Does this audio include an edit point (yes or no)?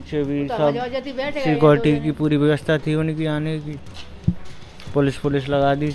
no